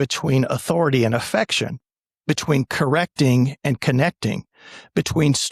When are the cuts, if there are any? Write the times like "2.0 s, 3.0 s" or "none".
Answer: none